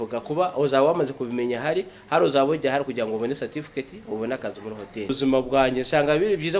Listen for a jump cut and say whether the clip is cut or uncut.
cut